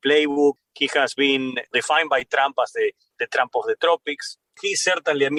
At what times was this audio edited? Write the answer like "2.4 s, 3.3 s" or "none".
none